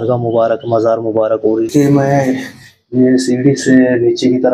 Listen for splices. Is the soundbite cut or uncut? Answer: cut